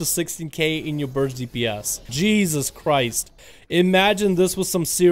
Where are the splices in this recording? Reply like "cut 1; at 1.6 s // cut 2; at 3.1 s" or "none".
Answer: cut 1; at 2.0 s